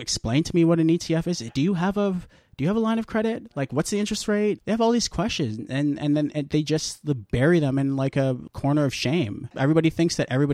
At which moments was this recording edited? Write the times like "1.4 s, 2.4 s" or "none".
4.6 s, 8.5 s, 9.6 s